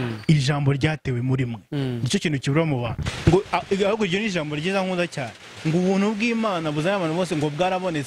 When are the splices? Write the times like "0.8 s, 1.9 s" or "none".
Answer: 3.0 s